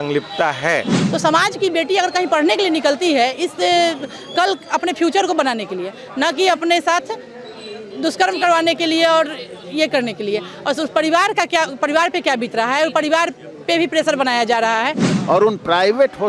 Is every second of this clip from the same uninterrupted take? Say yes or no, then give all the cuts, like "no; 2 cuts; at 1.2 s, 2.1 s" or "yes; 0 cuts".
no; 2 cuts; at 1.0 s, 15.1 s